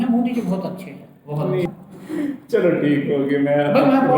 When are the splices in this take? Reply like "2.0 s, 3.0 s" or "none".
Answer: 1.7 s